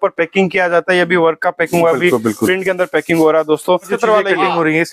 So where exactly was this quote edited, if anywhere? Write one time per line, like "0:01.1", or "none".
0:03.9